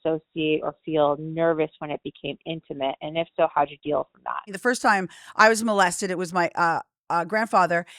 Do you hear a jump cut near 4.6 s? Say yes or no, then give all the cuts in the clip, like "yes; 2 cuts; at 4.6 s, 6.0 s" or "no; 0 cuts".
yes; 1 cut; at 4.6 s